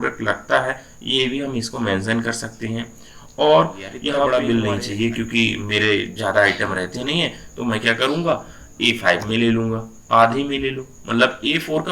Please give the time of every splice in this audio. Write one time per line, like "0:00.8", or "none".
0:04.3